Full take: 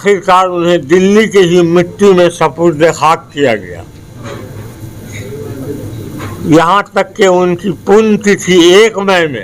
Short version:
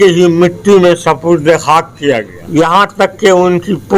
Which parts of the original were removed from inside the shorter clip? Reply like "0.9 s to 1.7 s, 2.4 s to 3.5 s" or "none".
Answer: 3.7 s to 6.3 s